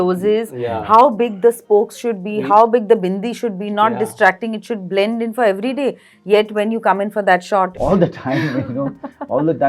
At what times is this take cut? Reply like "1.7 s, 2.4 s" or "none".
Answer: 7.7 s